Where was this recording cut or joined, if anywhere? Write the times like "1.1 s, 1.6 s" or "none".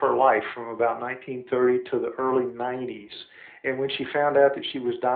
none

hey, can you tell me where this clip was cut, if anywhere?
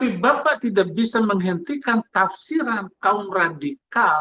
none

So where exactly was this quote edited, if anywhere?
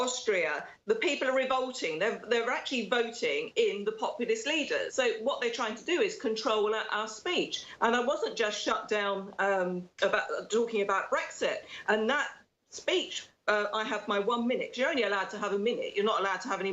4.9 s

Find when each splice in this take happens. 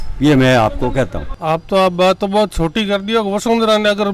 1.3 s

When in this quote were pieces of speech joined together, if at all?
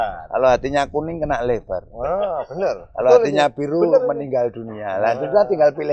none

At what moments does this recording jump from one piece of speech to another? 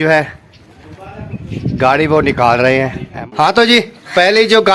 3.3 s

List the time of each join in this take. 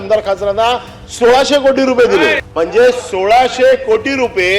2.4 s

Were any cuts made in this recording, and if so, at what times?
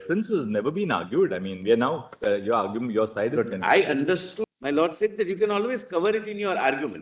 4.4 s

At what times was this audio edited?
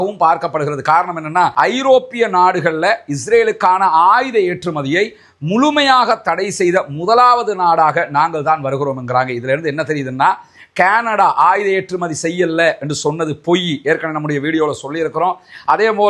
1.5 s

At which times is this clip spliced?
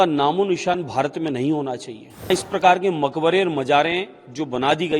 2.3 s

